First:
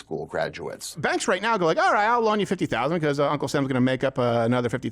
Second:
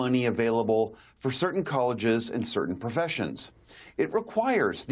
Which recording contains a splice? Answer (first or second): first